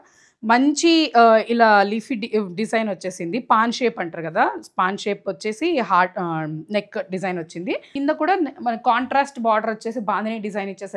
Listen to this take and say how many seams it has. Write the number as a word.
one